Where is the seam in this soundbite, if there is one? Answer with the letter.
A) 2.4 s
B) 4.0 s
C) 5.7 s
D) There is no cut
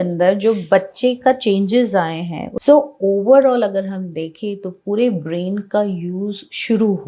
A